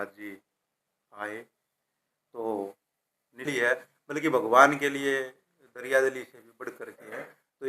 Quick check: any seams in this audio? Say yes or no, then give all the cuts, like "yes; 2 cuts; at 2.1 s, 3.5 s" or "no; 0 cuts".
yes; 1 cut; at 3.5 s